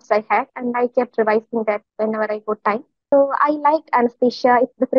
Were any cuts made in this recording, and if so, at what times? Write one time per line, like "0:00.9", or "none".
0:02.9